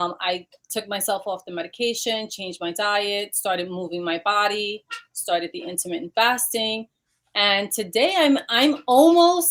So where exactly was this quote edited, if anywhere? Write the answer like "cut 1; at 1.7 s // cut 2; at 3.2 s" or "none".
none